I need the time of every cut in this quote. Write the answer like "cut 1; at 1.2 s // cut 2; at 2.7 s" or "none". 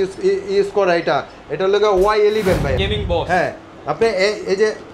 cut 1; at 2.8 s